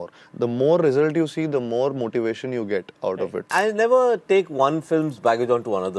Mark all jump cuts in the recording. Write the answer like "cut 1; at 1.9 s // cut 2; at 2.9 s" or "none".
cut 1; at 3.5 s